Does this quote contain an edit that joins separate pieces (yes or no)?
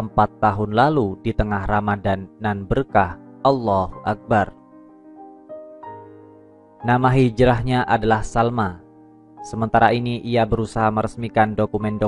yes